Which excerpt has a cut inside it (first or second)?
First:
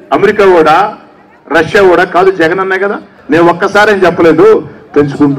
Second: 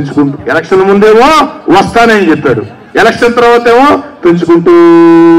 first